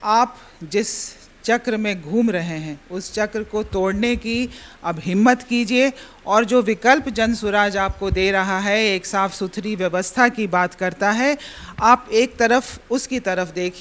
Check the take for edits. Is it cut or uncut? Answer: uncut